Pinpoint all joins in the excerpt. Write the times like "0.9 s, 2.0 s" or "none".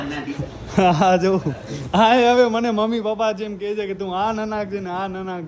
none